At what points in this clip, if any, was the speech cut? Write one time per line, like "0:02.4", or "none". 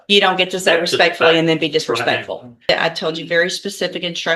0:02.7